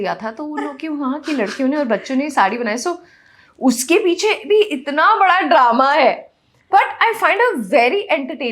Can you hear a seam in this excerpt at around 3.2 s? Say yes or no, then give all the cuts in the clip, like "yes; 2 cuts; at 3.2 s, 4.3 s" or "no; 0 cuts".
no; 0 cuts